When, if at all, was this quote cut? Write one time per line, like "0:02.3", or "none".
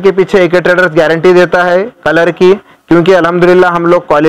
none